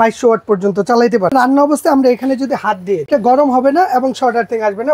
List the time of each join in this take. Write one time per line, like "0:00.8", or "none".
0:01.3
0:03.1